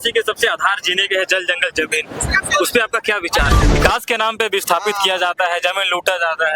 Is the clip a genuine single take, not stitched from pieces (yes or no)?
no